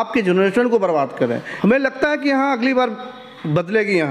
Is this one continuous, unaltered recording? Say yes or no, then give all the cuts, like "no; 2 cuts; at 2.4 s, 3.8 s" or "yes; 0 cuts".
no; 1 cut; at 1.5 s